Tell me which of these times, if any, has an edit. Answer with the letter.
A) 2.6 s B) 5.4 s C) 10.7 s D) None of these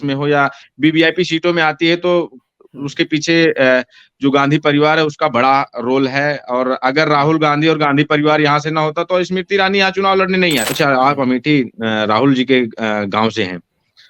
C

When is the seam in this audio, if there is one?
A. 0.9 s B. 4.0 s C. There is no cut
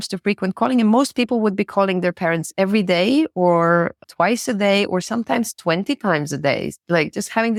C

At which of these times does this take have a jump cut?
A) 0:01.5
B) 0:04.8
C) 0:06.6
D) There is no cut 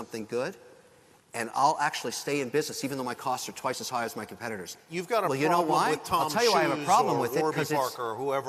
B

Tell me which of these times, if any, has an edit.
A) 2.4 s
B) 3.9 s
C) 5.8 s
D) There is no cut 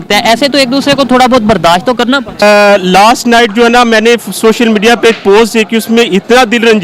A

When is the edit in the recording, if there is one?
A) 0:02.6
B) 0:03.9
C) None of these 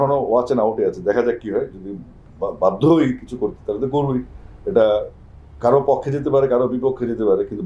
C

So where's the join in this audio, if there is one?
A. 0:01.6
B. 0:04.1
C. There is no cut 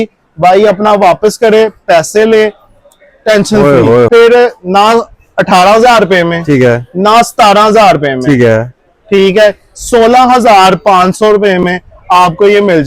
B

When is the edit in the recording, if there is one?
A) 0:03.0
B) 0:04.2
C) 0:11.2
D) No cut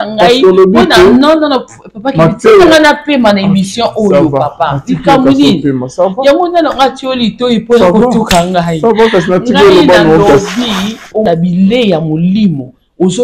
C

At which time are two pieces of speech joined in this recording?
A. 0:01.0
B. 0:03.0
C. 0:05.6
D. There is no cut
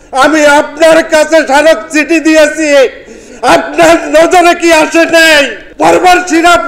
C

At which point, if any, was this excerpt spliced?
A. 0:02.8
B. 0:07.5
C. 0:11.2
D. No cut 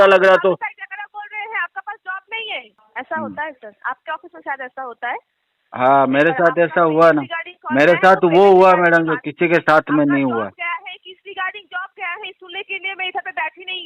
A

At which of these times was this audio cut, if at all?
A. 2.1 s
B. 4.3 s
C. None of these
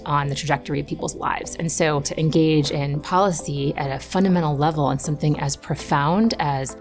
A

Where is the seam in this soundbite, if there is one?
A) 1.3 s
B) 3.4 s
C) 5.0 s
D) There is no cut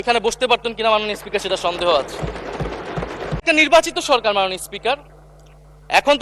B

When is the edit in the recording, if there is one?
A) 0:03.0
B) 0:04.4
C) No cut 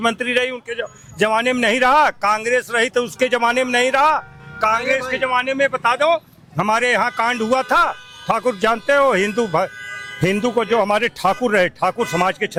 C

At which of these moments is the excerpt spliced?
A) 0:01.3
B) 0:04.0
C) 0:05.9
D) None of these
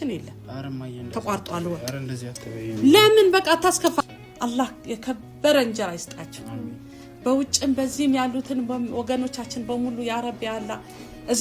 B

